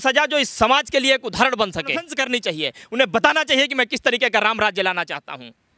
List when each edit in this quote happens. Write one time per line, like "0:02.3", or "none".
0:02.2